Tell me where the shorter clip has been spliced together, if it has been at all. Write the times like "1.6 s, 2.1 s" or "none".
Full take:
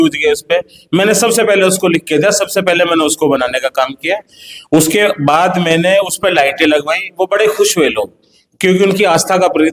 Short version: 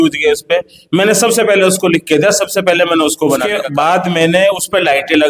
3.6 s